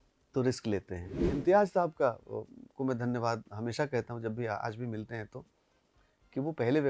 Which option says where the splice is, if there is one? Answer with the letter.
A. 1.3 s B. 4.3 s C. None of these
A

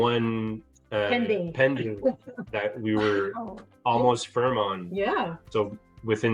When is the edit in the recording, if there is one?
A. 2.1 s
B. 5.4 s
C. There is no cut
B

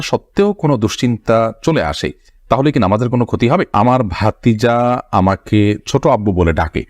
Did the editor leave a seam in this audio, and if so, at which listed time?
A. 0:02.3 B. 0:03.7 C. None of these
B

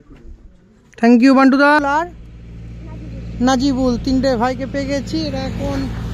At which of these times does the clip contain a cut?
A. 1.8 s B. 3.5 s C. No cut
A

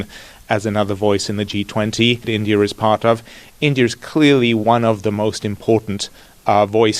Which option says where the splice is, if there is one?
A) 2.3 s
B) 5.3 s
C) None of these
A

